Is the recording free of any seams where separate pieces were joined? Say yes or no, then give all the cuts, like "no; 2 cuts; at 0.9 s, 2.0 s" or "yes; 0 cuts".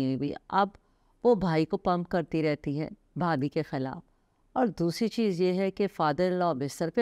yes; 0 cuts